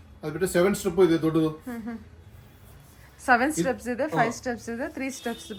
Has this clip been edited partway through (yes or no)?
no